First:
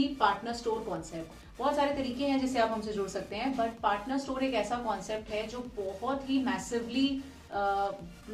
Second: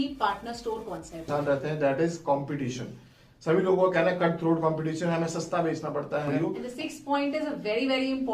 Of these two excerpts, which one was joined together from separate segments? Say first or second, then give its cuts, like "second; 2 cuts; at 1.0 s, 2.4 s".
second; 2 cuts; at 1.3 s, 6.5 s